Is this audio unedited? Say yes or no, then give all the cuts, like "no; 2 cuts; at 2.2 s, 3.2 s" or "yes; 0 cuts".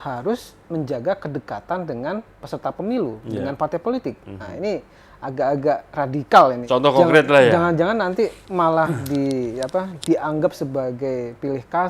no; 1 cut; at 6.6 s